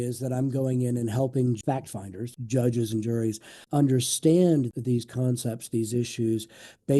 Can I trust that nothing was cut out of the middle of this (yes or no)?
no